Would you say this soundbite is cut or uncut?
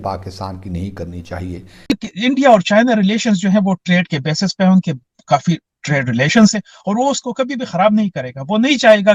cut